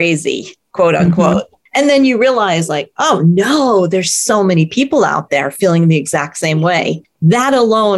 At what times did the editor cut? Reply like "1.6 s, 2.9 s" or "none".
1.6 s, 7.1 s